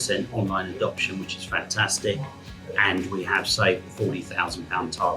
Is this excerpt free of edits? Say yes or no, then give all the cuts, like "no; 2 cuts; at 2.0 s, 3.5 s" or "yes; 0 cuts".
yes; 0 cuts